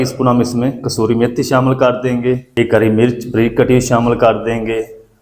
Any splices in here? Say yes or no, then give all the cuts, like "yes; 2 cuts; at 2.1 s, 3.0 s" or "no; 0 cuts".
yes; 1 cut; at 2.5 s